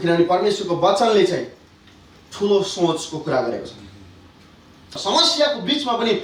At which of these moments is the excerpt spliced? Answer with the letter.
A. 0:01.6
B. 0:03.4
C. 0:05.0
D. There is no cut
C